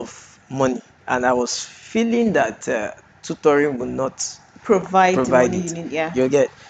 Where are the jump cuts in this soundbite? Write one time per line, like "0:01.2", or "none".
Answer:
0:00.9